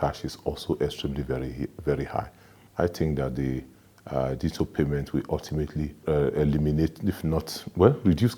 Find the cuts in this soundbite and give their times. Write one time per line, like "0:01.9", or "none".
0:02.6
0:06.0

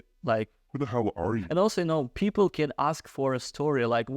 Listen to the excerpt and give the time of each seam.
0:01.4

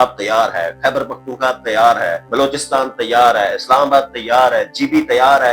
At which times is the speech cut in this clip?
0:02.2

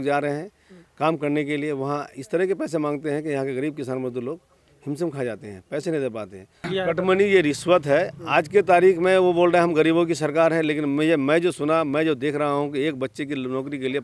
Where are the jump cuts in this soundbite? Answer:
0:06.7

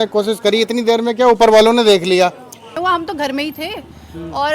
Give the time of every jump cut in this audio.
0:02.7

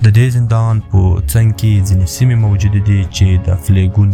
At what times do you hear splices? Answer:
none

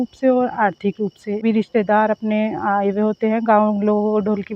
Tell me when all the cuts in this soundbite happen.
0:01.4

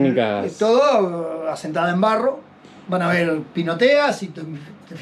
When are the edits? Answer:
none

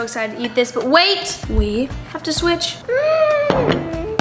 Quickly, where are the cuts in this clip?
none

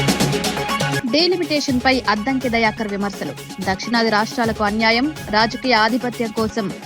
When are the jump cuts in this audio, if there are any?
0:00.9

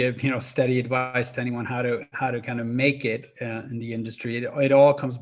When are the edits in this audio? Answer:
none

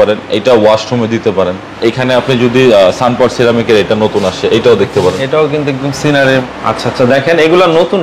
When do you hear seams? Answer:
0:01.6
0:06.4

